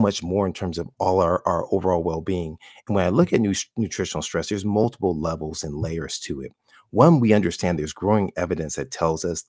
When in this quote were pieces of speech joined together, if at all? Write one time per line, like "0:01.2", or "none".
none